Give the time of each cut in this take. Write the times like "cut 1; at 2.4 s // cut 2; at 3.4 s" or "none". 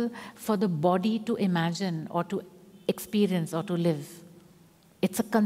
none